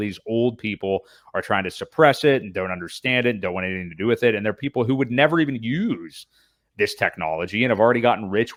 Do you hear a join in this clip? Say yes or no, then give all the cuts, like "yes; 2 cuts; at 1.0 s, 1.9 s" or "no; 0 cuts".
no; 0 cuts